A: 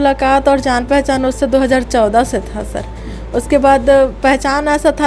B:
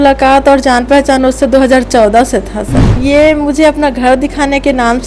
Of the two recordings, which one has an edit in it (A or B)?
B